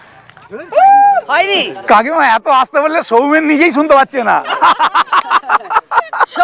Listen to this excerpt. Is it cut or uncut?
uncut